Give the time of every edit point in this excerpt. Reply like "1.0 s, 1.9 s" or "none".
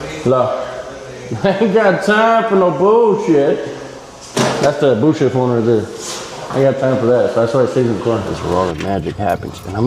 8.3 s

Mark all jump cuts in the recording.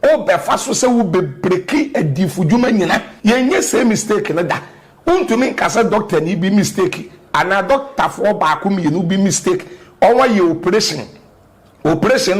3.1 s

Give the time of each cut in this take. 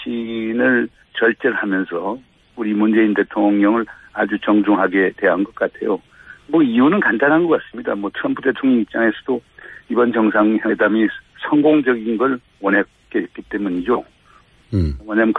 10.8 s

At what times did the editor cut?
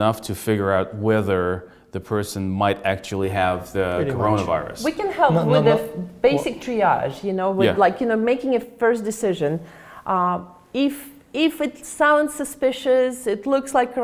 none

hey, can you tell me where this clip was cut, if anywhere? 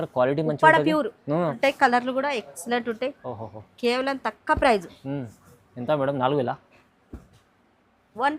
1.5 s

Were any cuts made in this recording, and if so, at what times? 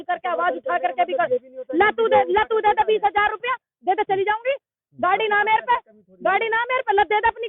none

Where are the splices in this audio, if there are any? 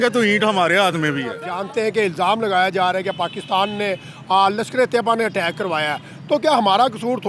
1.5 s

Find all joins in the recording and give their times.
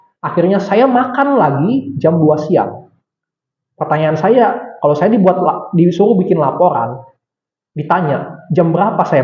none

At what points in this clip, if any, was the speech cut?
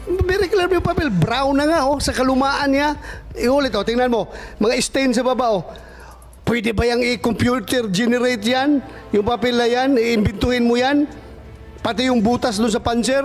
none

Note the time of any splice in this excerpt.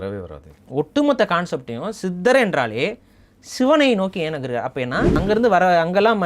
5.1 s

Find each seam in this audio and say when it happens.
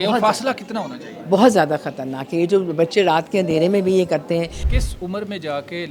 4.6 s

